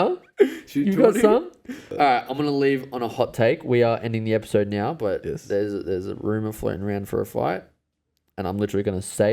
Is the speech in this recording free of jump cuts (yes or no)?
no